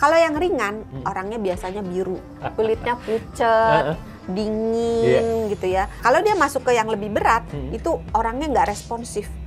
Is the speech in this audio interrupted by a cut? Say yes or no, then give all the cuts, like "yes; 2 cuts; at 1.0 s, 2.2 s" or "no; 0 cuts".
yes; 2 cuts; at 2.3 s, 6.0 s